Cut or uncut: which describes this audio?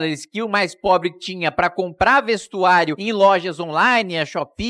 cut